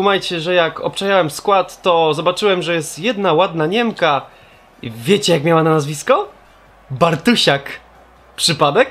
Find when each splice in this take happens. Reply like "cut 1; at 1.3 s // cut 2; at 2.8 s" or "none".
cut 1; at 4.3 s